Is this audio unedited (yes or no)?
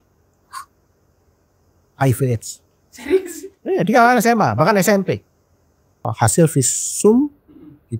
no